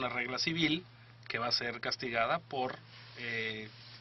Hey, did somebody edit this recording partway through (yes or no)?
yes